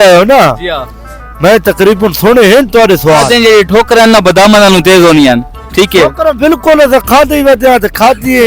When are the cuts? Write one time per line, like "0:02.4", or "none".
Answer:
0:03.2